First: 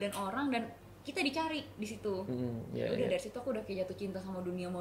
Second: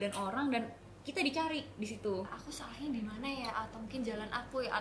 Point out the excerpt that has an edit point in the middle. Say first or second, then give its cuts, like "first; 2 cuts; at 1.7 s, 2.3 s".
second; 1 cut; at 2.3 s